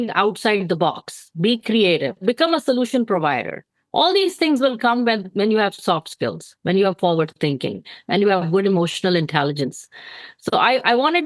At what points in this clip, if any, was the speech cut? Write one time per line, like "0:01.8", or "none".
0:02.2